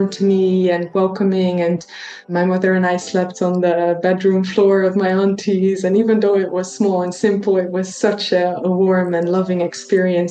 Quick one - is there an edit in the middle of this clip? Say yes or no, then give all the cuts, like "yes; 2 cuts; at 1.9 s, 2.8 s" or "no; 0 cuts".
yes; 1 cut; at 2.3 s